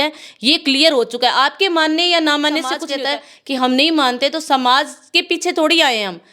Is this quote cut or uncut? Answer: cut